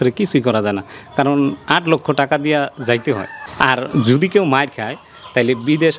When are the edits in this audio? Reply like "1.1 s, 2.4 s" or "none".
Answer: 3.4 s